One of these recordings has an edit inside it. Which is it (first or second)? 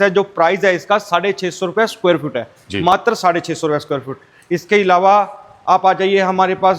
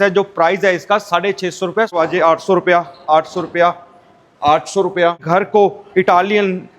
second